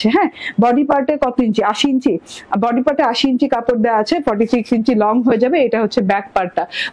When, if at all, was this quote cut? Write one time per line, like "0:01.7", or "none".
none